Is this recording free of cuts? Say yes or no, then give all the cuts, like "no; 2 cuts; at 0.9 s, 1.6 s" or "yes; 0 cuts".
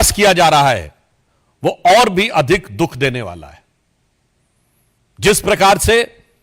yes; 0 cuts